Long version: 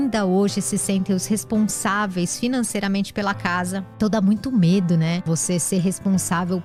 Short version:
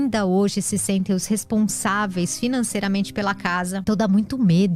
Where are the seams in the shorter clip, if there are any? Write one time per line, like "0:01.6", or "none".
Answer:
0:03.8